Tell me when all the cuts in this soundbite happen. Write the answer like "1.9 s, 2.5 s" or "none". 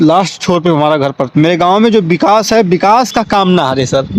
1.2 s